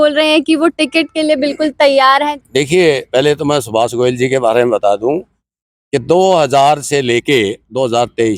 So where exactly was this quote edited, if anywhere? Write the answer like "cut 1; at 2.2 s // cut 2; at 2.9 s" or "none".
cut 1; at 2.3 s // cut 2; at 5.4 s